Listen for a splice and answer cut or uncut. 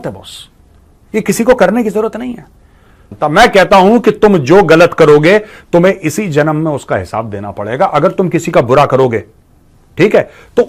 cut